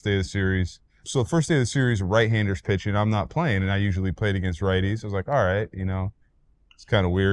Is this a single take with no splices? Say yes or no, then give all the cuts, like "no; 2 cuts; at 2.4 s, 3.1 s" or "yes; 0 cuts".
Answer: no; 1 cut; at 1.0 s